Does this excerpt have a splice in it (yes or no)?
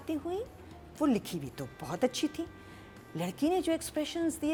no